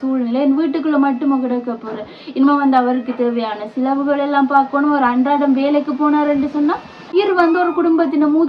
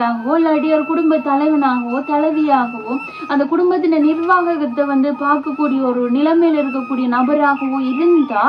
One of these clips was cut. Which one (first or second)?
first